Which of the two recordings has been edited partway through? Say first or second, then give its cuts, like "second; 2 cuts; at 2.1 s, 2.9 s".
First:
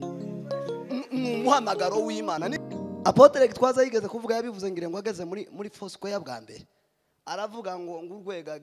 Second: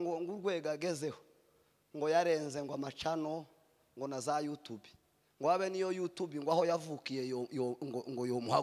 first; 1 cut; at 2.5 s